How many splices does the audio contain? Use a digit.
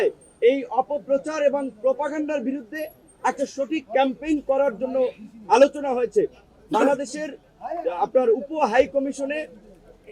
0